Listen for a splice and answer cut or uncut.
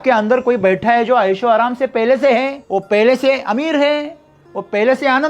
cut